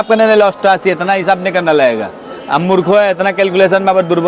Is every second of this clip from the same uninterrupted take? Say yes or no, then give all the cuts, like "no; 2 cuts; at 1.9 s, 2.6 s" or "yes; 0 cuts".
yes; 0 cuts